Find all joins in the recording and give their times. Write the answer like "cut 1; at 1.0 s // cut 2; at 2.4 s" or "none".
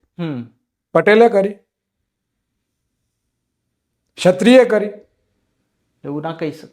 none